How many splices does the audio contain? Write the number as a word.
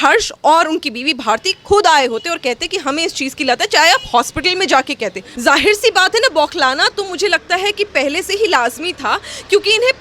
one